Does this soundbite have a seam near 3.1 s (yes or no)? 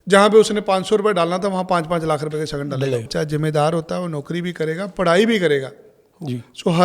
yes